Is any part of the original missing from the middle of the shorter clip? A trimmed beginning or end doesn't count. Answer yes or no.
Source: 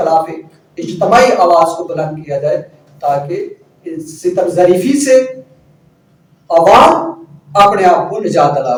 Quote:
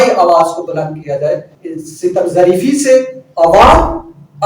yes